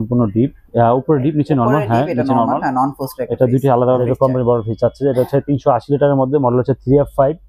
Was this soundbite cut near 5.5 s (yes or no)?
no